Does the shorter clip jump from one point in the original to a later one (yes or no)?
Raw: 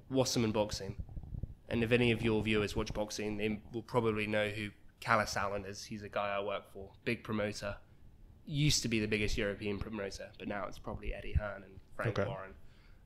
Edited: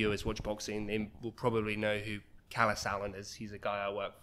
no